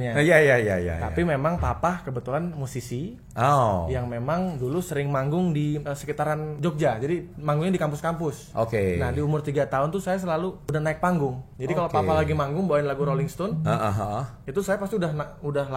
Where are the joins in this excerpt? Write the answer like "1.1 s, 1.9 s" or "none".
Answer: 6.3 s, 8.4 s, 10.6 s, 11.5 s